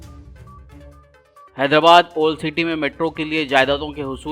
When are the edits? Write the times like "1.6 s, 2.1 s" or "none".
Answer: 1.1 s